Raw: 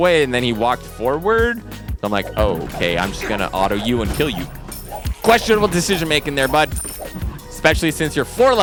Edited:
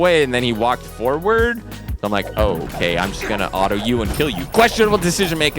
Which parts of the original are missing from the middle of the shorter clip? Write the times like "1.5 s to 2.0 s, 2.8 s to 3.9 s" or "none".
4.4 s to 5.1 s